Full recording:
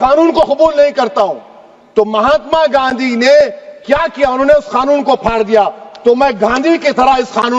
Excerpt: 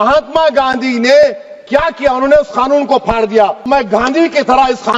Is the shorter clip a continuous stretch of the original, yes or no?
no